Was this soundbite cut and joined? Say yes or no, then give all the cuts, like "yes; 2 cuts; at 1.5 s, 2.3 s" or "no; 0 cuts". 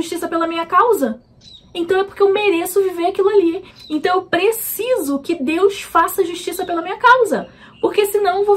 yes; 1 cut; at 3.7 s